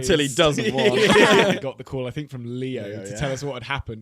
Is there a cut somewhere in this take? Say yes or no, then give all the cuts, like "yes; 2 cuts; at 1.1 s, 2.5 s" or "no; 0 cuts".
yes; 1 cut; at 1.5 s